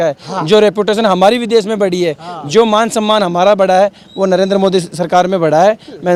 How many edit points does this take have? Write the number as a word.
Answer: zero